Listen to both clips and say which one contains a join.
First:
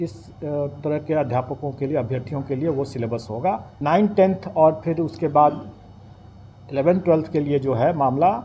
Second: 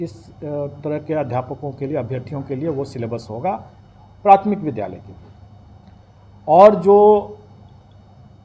first; 1 cut; at 3.7 s

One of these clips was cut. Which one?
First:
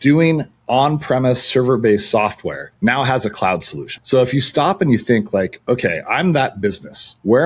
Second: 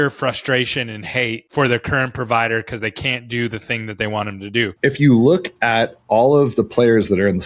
second; 1 cut; at 4.7 s

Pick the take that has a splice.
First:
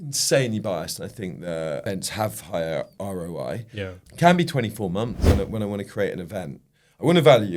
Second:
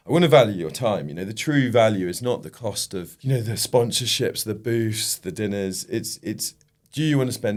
first; 3 cuts; at 1.8 s, 2.9 s, 5.3 s

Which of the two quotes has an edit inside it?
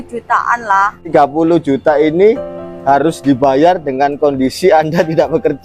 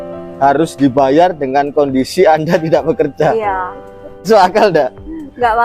first; 1 cut; at 1.1 s

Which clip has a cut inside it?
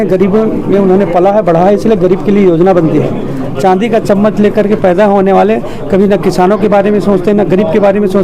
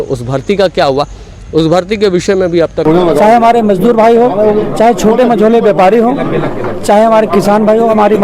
second; 1 cut; at 2.8 s

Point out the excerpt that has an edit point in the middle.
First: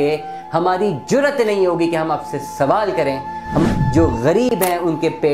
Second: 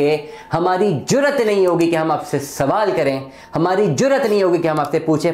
first; 1 cut; at 3.7 s

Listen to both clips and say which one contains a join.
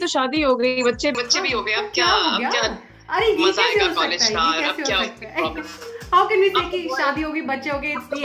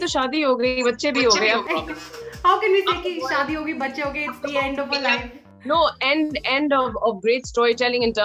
second; 2 cuts; at 1.6 s, 5.4 s

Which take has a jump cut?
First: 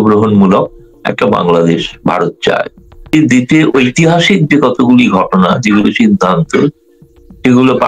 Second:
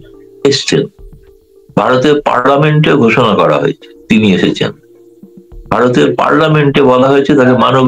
first; 1 cut; at 3.1 s

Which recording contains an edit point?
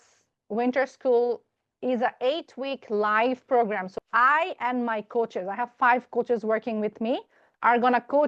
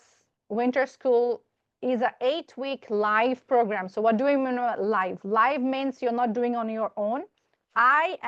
first; 2 cuts; at 3.9 s, 7.4 s

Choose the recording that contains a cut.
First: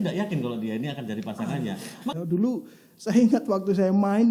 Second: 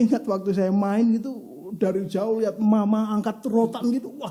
first; 1 cut; at 2.1 s

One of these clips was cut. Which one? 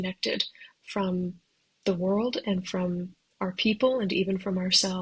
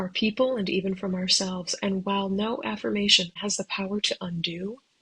second; 1 cut; at 3.3 s

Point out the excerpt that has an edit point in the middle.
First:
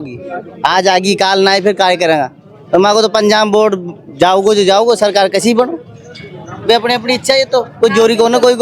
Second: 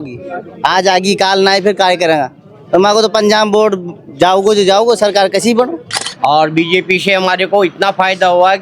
second; 1 cut; at 6.0 s

